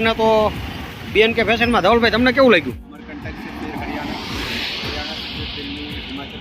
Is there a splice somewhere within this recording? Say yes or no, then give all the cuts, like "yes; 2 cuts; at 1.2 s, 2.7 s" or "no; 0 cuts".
yes; 1 cut; at 2.9 s